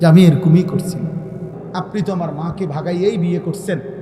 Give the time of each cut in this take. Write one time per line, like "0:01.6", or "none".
0:01.5

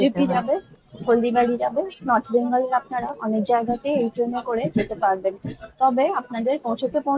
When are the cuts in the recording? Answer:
none

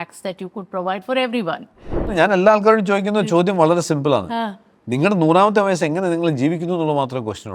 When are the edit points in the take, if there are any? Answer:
0:02.1

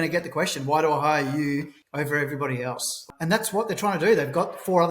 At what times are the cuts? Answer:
0:01.8
0:03.0

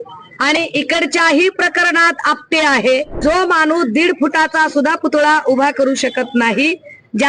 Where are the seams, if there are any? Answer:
0:03.2

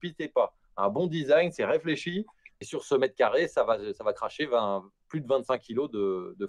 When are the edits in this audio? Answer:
0:02.6

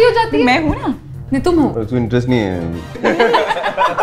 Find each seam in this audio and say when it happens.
0:01.8
0:03.0

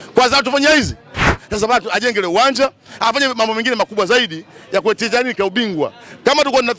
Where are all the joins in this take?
0:01.2

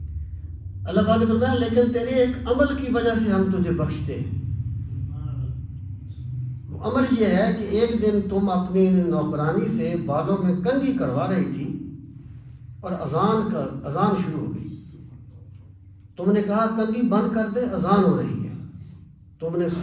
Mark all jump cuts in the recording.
none

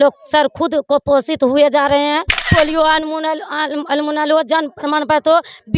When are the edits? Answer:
0:02.4

